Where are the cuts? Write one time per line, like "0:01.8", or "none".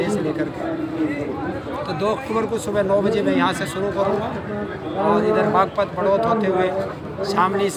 none